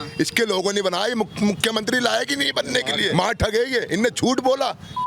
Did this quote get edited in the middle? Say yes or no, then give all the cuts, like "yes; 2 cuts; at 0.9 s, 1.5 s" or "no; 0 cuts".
yes; 1 cut; at 3.1 s